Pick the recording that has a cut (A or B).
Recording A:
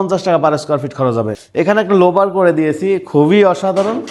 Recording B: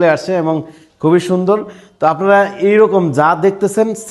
A